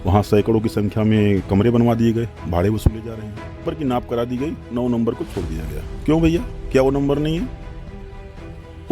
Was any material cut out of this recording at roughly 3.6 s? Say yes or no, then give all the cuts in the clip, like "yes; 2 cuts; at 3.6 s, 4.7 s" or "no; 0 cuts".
yes; 1 cut; at 3.6 s